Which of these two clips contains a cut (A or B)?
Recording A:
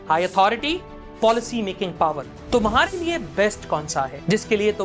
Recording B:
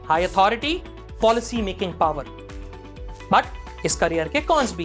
A